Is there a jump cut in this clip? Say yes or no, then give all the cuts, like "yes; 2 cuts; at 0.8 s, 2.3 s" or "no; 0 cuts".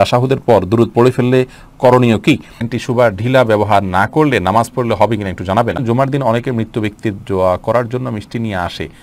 yes; 2 cuts; at 2.7 s, 5.8 s